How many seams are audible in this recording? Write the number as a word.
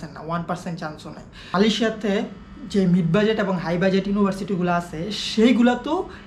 one